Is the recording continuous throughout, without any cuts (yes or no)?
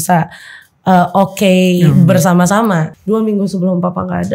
no